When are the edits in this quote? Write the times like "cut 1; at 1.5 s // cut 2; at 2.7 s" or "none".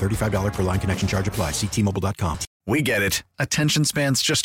cut 1; at 2.5 s